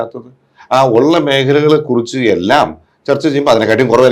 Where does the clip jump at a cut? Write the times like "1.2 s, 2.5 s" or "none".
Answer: none